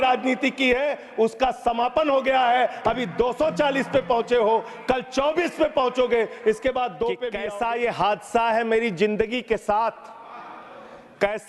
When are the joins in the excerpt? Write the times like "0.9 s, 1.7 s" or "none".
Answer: 7.3 s